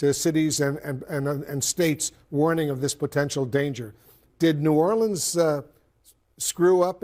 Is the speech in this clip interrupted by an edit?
no; 0 cuts

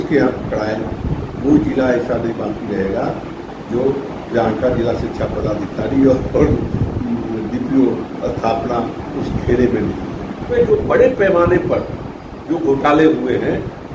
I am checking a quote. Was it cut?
yes; 1 cut; at 10.7 s

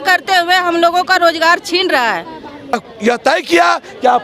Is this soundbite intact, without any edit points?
no; 1 cut; at 2.8 s

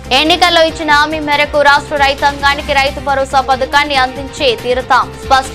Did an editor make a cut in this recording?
no; 0 cuts

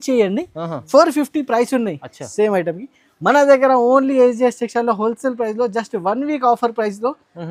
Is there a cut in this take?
no; 0 cuts

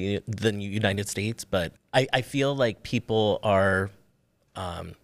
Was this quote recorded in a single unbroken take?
no; 1 cut; at 1.8 s

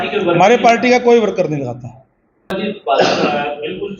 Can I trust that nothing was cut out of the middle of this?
no; 1 cut; at 2.6 s

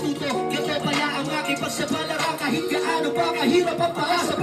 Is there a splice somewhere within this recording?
no; 0 cuts

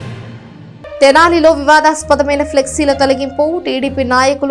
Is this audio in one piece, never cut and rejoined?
no; 1 cut; at 1.0 s

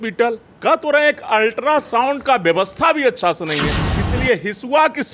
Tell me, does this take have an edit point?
yes; 1 cut; at 3.8 s

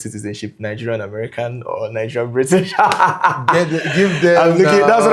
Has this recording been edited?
no; 0 cuts

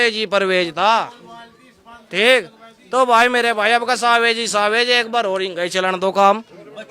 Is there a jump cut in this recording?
no; 0 cuts

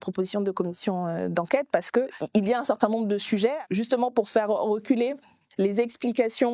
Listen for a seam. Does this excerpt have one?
yes; 2 cuts; at 2.2 s, 3.6 s

